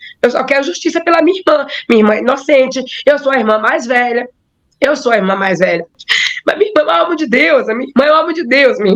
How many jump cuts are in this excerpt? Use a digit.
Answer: 1